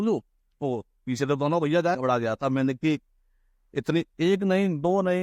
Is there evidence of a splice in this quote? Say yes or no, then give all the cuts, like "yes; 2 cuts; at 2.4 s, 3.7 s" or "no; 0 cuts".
yes; 1 cut; at 1.9 s